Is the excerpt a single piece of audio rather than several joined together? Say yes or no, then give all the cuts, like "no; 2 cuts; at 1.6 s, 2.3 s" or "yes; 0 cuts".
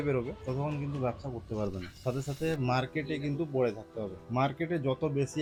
yes; 0 cuts